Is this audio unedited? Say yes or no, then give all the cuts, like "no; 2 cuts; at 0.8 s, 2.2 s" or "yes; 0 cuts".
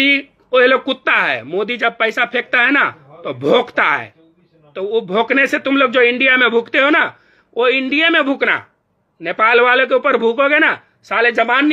yes; 0 cuts